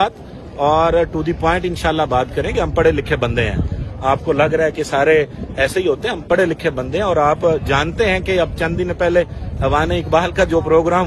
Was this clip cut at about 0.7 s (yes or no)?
no